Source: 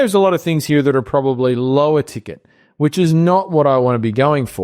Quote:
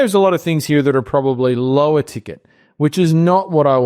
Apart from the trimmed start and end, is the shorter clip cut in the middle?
no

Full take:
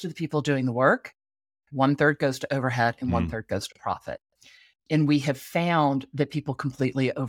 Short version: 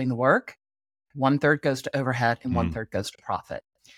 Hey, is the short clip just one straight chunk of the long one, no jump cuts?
yes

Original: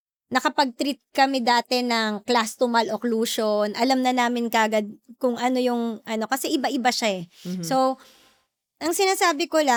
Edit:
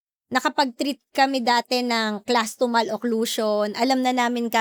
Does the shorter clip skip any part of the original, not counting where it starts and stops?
no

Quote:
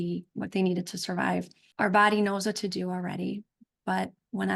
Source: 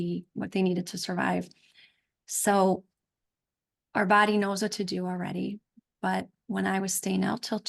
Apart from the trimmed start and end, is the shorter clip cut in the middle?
yes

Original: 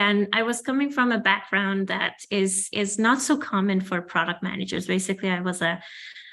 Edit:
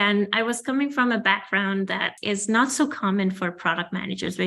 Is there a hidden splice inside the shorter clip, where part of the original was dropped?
yes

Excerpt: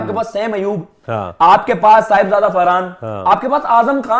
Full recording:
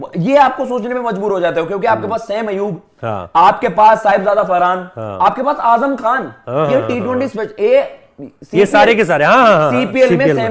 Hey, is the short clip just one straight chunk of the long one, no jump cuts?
yes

